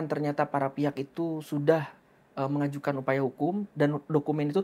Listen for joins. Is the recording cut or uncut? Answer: uncut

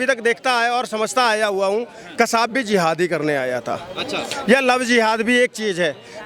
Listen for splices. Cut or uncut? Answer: uncut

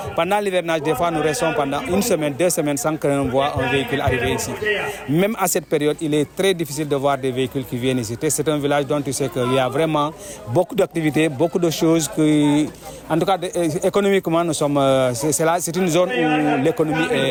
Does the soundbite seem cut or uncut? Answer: uncut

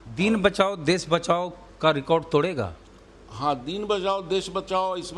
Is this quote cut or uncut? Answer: uncut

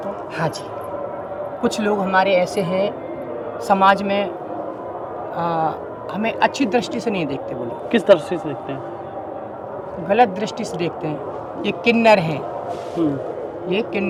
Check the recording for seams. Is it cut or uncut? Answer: uncut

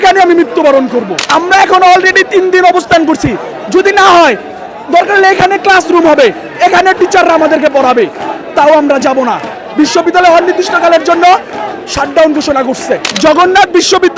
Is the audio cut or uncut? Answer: cut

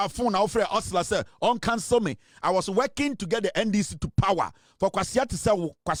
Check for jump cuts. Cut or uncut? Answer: uncut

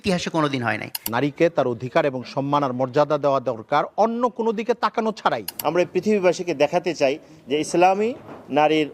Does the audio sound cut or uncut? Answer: cut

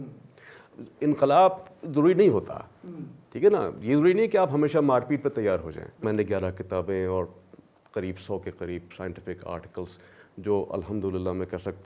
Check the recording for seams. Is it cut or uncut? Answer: cut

